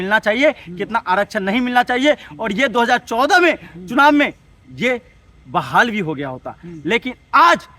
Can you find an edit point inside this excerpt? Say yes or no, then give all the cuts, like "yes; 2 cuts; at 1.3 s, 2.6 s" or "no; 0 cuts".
no; 0 cuts